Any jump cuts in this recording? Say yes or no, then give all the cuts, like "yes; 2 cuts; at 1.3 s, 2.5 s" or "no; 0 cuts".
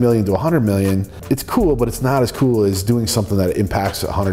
yes; 1 cut; at 1.1 s